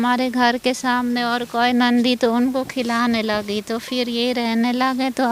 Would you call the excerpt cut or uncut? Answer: uncut